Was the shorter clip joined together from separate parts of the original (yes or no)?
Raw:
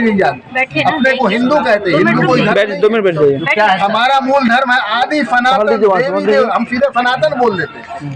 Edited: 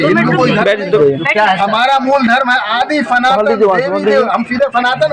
yes